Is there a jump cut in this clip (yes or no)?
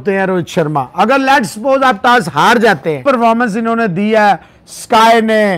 yes